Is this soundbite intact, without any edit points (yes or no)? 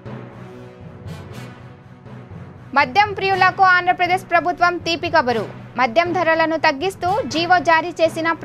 no